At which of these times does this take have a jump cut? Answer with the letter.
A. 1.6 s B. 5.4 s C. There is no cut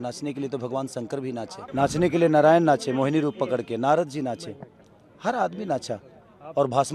A